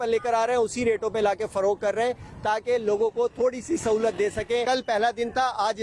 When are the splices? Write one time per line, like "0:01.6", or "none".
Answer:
0:04.6